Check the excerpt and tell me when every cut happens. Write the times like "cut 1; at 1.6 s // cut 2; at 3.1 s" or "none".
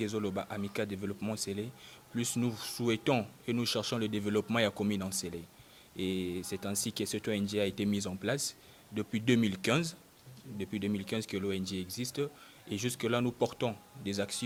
none